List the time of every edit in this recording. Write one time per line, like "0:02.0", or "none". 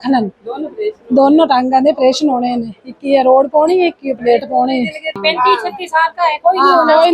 0:05.2

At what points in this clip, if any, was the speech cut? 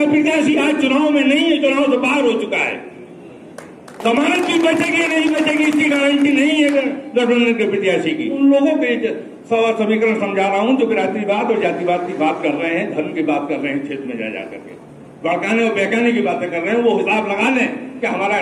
0:08.4

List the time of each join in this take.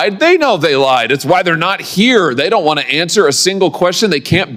none

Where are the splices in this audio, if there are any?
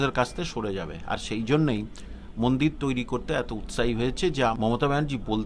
0:04.5

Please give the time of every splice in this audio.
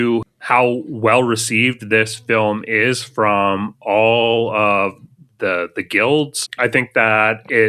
none

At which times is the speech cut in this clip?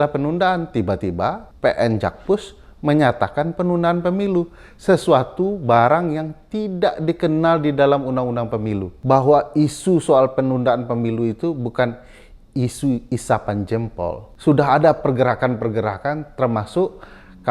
0:01.5
0:08.9
0:14.3

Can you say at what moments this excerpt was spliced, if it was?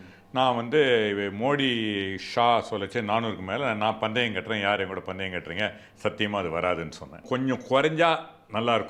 0:07.2

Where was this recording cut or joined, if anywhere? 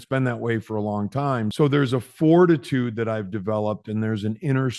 0:01.5

